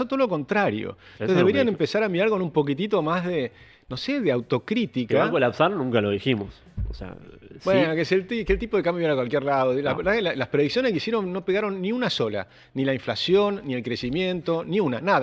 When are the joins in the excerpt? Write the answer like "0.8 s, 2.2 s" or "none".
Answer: none